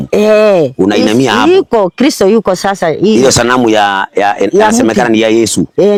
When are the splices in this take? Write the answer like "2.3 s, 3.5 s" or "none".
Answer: none